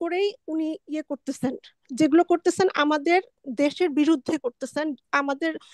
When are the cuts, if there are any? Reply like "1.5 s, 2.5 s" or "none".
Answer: none